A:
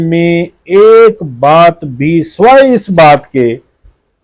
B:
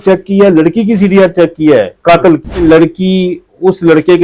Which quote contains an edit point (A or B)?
B